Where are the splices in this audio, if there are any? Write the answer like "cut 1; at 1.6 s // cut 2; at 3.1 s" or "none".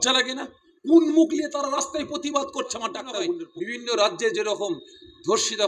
cut 1; at 3.5 s